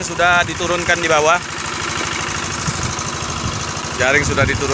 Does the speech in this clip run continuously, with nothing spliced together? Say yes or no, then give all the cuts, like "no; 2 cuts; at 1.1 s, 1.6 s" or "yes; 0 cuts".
yes; 0 cuts